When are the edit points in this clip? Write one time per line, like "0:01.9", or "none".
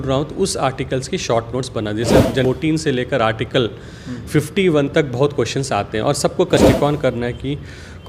0:02.4
0:06.6